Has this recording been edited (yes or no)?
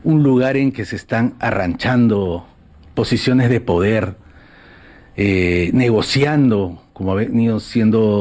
no